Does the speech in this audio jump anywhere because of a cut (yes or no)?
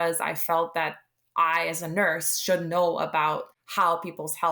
yes